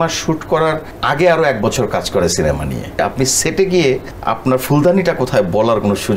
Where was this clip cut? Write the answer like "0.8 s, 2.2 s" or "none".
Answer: 0.9 s, 3.0 s, 4.1 s